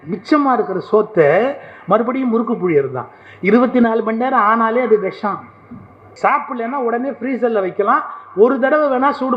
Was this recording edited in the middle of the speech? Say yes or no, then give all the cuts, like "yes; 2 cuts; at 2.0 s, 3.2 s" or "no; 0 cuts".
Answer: yes; 1 cut; at 6.1 s